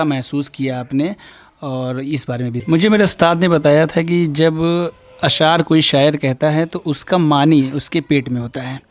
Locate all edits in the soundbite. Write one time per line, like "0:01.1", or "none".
0:02.6